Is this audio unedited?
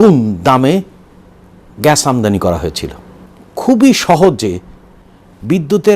yes; 0 cuts

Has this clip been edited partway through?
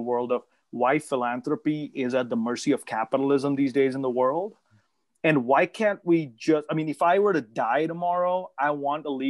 no; 0 cuts

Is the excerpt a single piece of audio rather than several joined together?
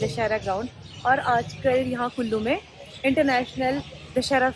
yes; 0 cuts

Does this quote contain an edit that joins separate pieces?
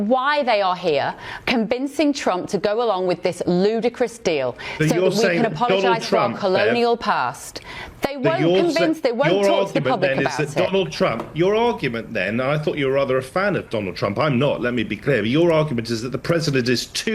no; 0 cuts

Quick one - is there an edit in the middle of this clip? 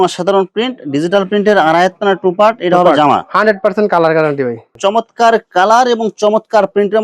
yes; 1 cut; at 4.6 s

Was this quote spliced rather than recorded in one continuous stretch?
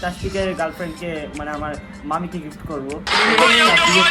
no; 0 cuts

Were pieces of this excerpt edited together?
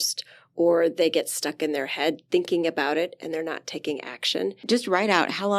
yes; 1 cut; at 4.6 s

